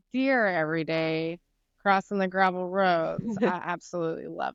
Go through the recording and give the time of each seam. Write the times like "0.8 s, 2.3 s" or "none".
none

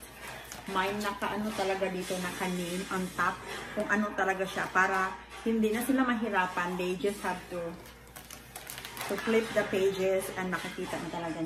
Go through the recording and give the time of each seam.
none

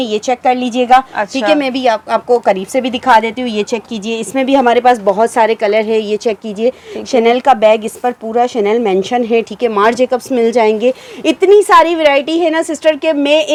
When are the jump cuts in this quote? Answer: none

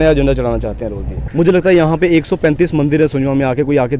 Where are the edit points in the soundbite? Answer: 1.2 s

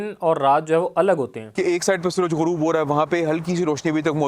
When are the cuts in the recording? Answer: 1.4 s

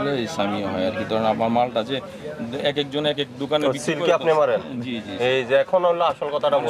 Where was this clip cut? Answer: none

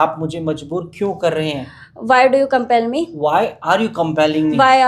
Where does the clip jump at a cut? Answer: none

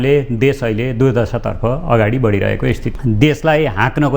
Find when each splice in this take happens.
2.9 s

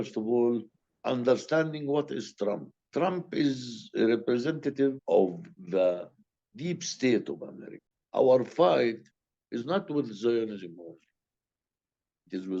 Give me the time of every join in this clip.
7.8 s

